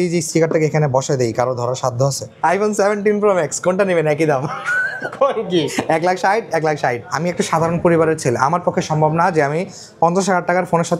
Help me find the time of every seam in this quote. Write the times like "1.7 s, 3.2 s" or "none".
2.2 s, 7.1 s